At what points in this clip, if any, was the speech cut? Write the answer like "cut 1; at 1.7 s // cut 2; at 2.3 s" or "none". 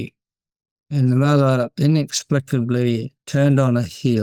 none